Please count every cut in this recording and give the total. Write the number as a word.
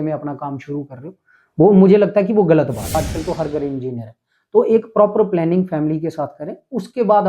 one